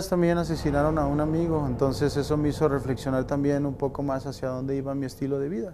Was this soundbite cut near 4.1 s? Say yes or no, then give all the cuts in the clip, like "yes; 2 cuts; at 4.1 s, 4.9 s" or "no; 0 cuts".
no; 1 cut; at 1.1 s